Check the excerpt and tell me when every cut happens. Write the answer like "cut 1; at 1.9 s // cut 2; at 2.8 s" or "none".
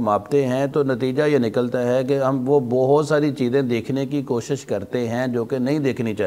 none